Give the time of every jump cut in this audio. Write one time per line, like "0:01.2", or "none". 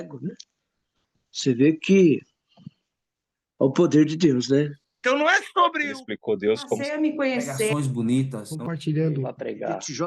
0:04.9